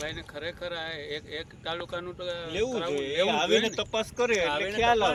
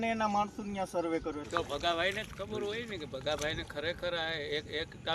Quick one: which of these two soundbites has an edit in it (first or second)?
second